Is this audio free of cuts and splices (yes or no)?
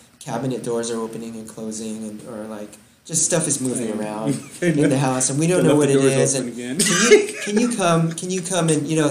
yes